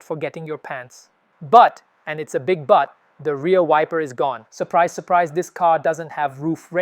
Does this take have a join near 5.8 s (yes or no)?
no